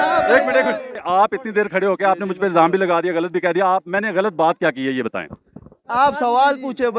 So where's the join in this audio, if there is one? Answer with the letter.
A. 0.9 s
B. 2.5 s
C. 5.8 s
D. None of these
A